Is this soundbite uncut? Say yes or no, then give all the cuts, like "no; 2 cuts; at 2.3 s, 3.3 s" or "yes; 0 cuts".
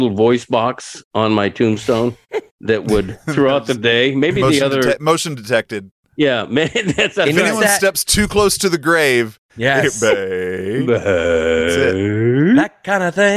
no; 1 cut; at 2.3 s